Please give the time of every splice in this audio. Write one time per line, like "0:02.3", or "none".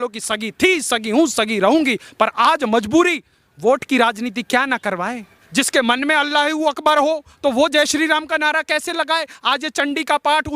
0:05.4